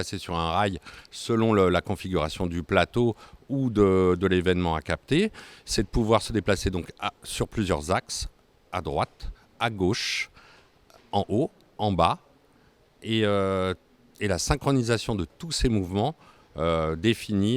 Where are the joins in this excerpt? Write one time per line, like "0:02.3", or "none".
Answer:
none